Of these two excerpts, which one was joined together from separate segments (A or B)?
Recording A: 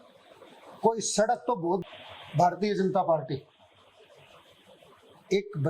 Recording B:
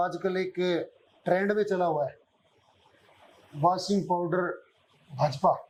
A